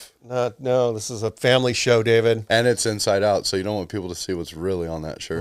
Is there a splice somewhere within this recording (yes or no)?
no